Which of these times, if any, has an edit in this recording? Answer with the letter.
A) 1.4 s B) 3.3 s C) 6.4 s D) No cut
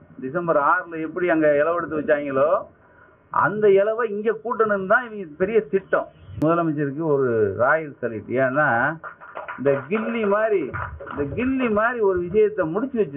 C